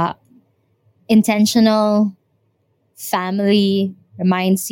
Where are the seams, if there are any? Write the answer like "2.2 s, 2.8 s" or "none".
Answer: none